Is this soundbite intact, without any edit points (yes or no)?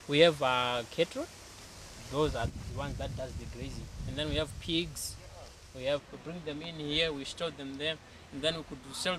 no